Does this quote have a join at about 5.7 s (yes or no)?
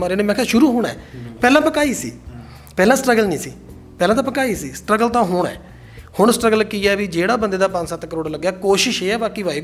no